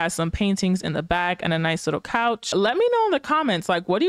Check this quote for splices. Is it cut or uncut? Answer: cut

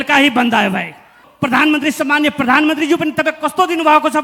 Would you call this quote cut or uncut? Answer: cut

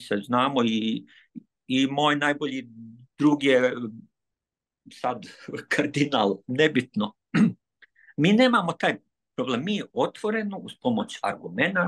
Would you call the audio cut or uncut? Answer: uncut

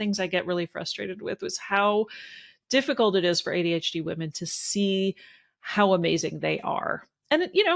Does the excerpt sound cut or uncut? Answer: uncut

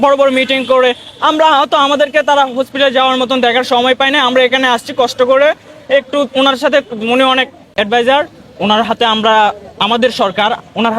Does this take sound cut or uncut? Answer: cut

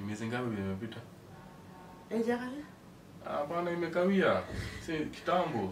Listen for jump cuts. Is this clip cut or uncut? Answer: uncut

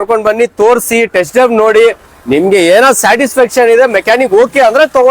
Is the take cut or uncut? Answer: uncut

